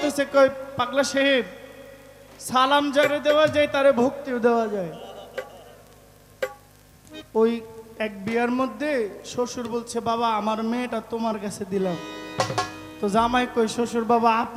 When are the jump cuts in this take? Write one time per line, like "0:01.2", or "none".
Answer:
none